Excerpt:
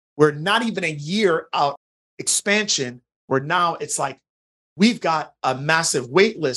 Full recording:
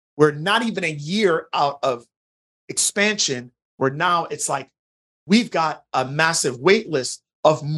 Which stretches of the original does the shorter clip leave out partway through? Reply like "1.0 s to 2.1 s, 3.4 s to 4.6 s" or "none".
1.8 s to 2.3 s